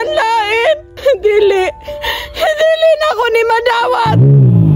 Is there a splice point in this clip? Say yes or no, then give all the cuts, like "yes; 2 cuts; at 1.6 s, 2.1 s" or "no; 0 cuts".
no; 0 cuts